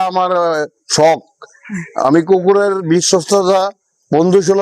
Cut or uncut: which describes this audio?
uncut